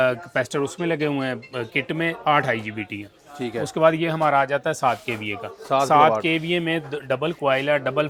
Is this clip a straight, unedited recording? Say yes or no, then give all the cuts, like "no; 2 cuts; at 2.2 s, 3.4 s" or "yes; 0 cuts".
yes; 0 cuts